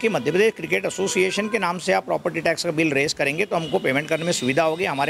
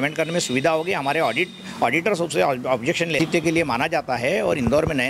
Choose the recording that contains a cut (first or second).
second